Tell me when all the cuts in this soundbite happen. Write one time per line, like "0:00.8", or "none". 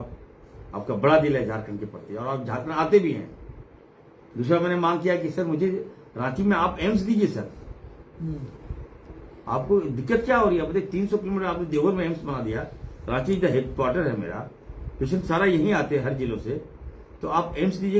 none